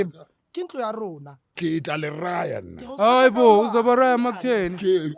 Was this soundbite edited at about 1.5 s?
yes; 1 cut; at 1.5 s

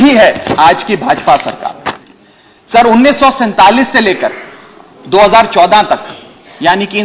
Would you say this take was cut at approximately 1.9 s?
yes; 1 cut; at 1.9 s

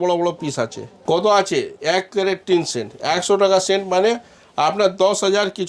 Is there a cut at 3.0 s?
no; 1 cut; at 0.9 s

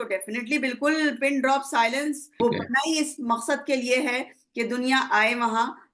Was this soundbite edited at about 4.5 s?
no; 1 cut; at 2.4 s

